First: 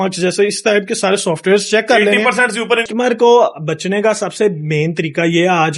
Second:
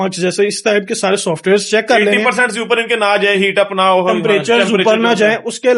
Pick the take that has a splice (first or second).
first